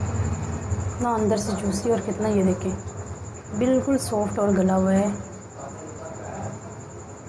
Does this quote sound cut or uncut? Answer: cut